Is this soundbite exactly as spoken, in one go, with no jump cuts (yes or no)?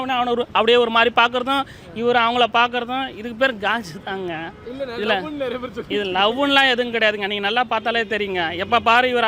yes